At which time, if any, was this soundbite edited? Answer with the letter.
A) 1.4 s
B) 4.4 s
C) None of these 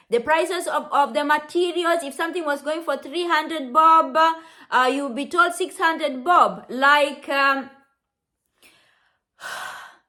C